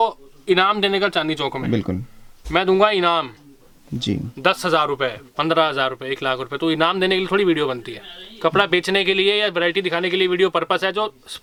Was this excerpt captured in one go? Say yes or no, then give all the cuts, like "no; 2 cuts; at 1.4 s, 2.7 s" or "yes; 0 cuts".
yes; 0 cuts